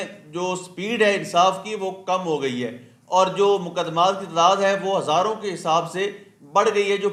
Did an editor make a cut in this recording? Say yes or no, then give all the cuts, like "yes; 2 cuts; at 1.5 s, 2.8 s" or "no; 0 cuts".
no; 0 cuts